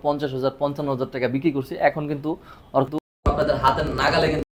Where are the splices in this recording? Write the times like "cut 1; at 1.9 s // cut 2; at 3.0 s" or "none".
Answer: none